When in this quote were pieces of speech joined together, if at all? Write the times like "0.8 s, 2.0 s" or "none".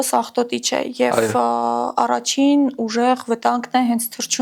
none

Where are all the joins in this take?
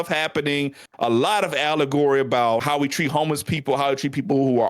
2.6 s

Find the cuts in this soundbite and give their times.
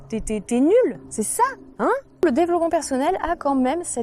1.0 s, 2.2 s

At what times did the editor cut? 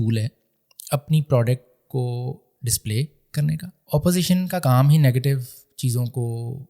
3.8 s

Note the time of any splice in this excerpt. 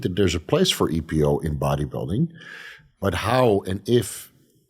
none

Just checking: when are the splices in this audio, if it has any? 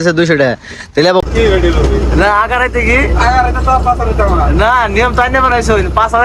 1.2 s

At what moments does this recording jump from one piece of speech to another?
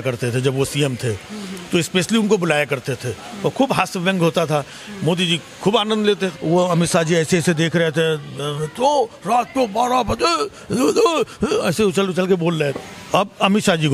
6.3 s, 12.7 s

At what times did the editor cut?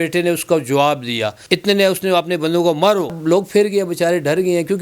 1.3 s, 3.2 s

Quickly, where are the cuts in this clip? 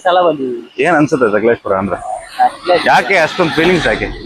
none

